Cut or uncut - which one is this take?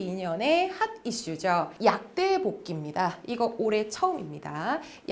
cut